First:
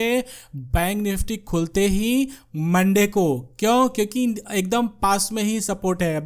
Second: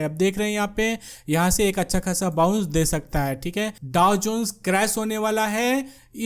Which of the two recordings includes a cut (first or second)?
second